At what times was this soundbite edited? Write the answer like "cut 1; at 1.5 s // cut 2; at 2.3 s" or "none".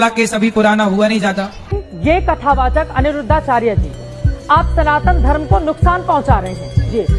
cut 1; at 1.7 s